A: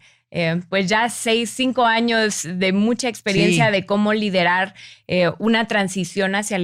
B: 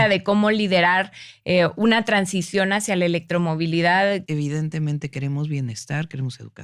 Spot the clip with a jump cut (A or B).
B